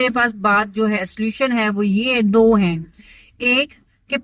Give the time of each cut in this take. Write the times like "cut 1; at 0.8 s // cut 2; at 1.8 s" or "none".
none